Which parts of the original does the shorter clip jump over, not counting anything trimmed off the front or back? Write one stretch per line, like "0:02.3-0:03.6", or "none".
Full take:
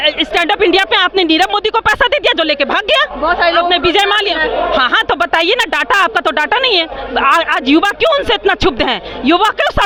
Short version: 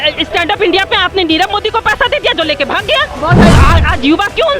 0:03.6-0:07.2